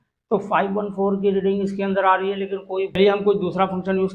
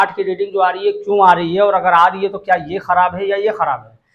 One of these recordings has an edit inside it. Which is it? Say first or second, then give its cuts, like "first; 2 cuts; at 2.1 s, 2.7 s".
first; 1 cut; at 3.0 s